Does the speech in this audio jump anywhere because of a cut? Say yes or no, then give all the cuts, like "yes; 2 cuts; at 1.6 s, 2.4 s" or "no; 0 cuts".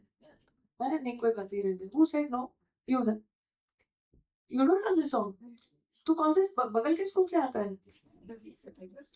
no; 0 cuts